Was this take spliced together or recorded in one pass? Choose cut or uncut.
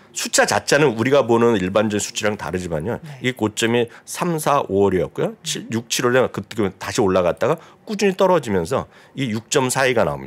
uncut